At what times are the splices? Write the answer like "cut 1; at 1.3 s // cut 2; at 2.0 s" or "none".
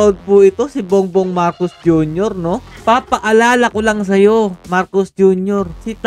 cut 1; at 2.7 s